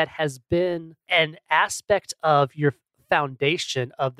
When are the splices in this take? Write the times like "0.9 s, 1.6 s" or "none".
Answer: 1.0 s